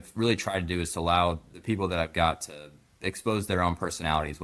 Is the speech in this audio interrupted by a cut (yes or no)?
yes